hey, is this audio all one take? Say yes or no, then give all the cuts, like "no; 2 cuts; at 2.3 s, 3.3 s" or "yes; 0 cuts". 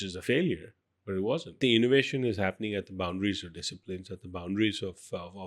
no; 1 cut; at 1.6 s